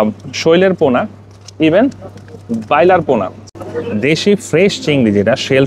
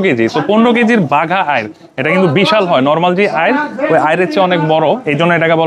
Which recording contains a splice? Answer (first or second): first